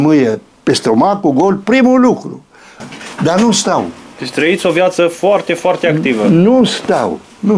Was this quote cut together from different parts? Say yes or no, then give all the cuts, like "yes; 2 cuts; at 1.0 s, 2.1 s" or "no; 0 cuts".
yes; 1 cut; at 2.7 s